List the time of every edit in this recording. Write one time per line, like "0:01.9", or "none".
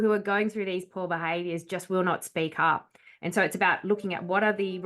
none